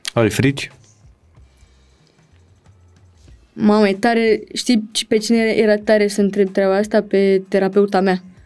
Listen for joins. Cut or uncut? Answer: uncut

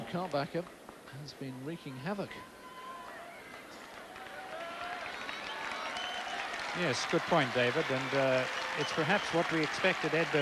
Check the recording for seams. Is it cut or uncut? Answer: uncut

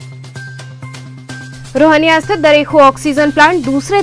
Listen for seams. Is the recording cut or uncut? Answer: cut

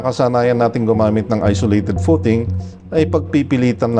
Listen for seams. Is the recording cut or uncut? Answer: uncut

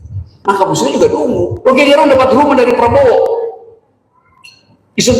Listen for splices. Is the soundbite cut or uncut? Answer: cut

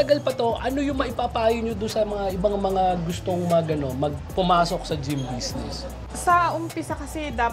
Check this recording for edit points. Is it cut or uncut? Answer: cut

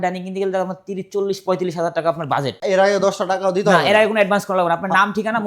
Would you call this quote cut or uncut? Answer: cut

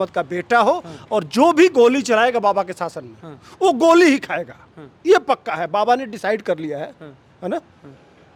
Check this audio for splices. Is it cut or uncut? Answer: uncut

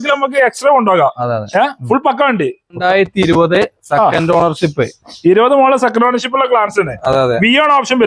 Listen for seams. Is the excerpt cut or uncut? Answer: cut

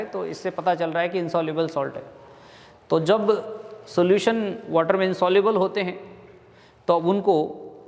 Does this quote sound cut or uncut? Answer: uncut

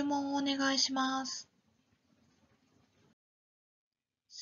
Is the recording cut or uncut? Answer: uncut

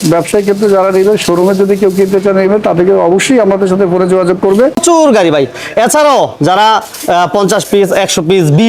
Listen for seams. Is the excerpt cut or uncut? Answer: cut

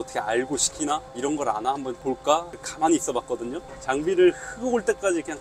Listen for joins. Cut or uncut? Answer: cut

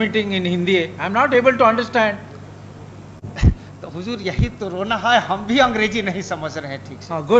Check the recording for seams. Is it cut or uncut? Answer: uncut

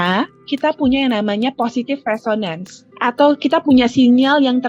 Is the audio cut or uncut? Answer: uncut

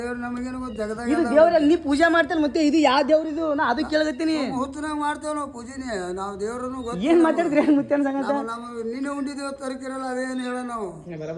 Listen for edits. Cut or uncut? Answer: uncut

